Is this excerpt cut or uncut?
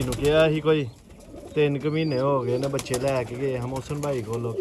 uncut